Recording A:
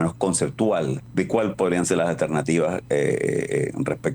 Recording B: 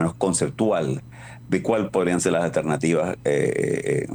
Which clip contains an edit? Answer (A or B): A